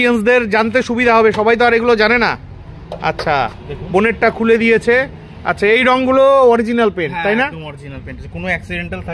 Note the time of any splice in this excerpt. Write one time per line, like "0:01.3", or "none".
none